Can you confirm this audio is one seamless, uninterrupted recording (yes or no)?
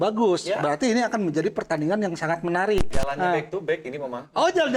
no